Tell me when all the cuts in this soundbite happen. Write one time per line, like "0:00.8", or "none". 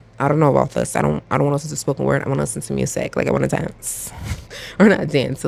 none